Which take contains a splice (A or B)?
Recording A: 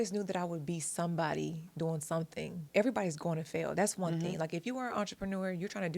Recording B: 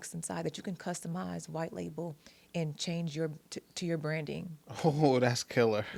A